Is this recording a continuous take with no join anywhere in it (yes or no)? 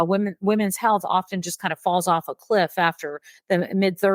yes